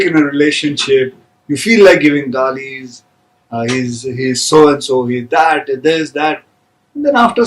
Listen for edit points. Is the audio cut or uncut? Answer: uncut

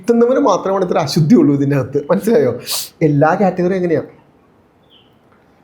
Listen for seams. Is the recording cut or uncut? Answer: uncut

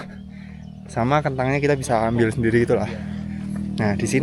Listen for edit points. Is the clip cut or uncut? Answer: uncut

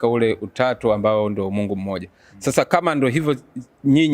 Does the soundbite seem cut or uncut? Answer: uncut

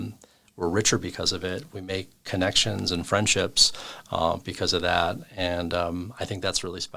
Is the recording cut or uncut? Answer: uncut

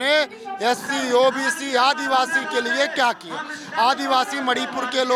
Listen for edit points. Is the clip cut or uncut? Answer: uncut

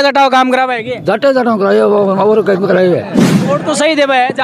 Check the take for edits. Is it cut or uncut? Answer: cut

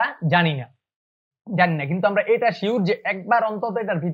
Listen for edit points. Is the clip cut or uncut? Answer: uncut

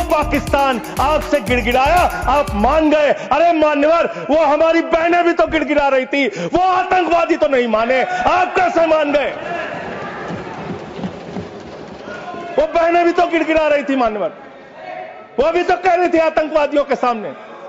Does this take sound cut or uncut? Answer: uncut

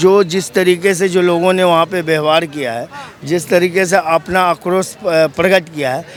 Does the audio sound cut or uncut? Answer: uncut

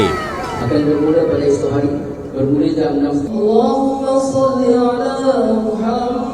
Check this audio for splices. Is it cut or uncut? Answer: uncut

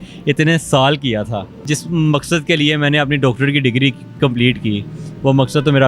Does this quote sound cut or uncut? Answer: cut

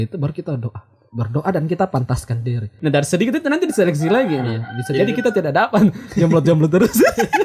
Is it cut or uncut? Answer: cut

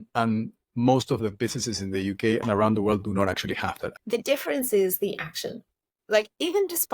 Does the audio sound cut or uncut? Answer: cut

